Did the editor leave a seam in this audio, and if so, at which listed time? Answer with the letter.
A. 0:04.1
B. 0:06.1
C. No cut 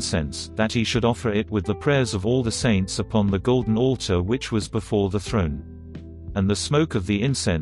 B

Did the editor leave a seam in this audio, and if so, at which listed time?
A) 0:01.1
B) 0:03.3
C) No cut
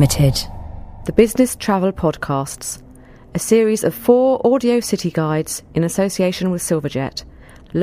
A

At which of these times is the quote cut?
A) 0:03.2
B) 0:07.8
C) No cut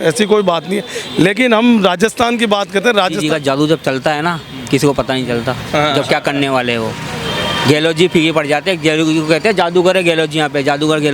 A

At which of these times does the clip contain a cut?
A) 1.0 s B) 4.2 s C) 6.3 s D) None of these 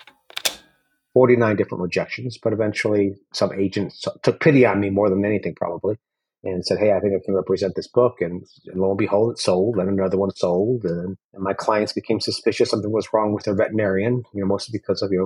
A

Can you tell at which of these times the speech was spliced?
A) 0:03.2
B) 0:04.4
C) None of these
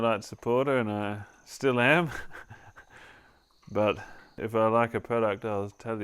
B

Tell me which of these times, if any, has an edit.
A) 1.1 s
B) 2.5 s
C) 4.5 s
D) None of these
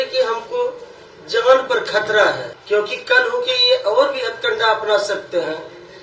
B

